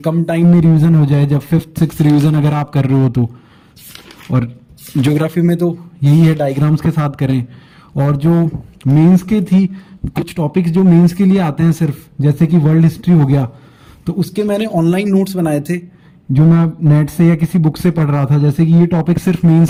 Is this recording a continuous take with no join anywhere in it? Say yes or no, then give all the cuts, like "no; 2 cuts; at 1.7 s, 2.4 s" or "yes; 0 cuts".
yes; 0 cuts